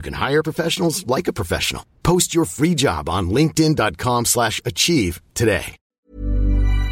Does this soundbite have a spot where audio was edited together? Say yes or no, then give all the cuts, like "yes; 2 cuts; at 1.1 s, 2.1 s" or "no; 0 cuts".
yes; 1 cut; at 5.8 s